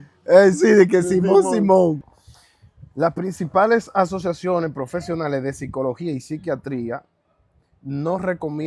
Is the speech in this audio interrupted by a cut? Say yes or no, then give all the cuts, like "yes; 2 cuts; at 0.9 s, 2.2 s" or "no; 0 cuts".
yes; 1 cut; at 2.1 s